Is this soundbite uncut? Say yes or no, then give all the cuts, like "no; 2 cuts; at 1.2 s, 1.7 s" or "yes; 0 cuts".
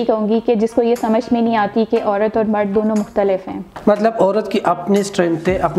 no; 1 cut; at 3.7 s